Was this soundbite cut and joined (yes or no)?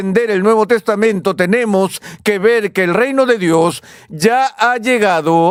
no